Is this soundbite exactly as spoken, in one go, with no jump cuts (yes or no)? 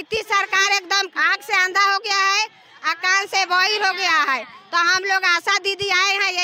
yes